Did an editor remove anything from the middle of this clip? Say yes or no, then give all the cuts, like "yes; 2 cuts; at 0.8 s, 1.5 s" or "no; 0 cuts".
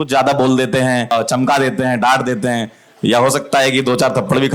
yes; 1 cut; at 1.1 s